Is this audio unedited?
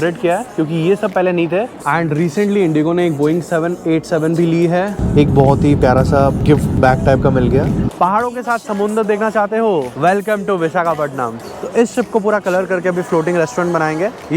no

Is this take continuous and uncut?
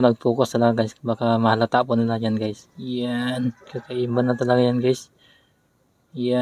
yes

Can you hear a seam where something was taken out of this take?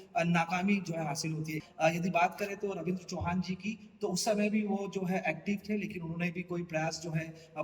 yes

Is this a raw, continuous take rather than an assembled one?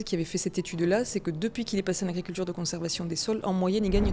yes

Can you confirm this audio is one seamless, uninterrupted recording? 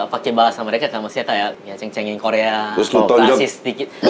no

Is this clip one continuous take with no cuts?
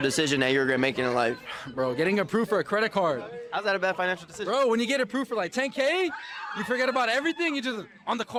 yes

